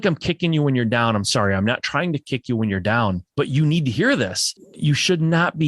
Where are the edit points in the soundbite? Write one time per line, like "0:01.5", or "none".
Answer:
0:03.2
0:04.7